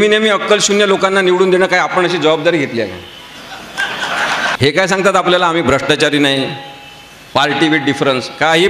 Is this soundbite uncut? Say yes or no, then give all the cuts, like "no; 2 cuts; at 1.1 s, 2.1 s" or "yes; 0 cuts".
no; 1 cut; at 4.6 s